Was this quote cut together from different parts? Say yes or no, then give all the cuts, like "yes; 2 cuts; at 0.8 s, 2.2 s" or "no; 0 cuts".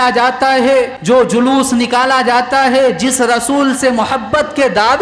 yes; 1 cut; at 0.9 s